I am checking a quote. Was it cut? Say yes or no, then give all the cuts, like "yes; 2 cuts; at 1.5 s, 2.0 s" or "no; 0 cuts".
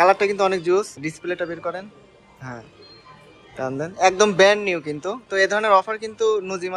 yes; 1 cut; at 1.0 s